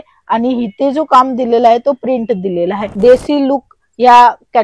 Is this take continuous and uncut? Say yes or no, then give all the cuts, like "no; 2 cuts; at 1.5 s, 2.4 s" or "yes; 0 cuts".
no; 1 cut; at 2.8 s